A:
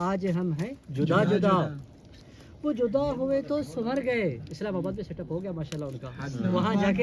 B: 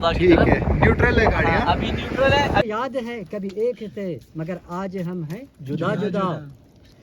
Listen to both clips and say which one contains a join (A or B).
B